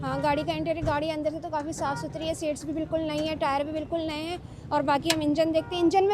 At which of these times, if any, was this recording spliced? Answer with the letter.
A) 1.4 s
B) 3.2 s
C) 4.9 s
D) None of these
D